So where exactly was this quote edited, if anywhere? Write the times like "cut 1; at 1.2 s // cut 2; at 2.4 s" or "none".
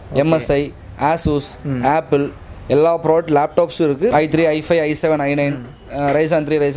cut 1; at 4.1 s